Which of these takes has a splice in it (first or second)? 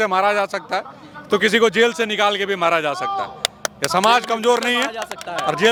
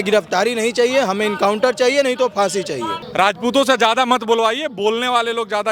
second